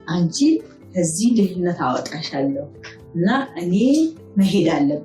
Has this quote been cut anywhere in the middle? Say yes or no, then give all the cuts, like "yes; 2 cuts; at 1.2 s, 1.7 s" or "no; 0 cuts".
no; 0 cuts